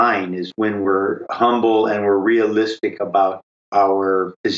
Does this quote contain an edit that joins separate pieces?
no; 0 cuts

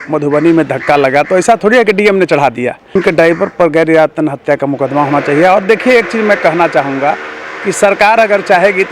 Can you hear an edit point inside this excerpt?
yes; 1 cut; at 3.0 s

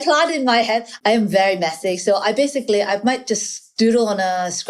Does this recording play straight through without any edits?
no; 1 cut; at 0.9 s

